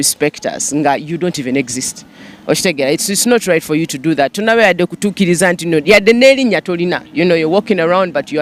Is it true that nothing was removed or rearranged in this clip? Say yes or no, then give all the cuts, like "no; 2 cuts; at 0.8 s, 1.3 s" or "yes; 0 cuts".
yes; 0 cuts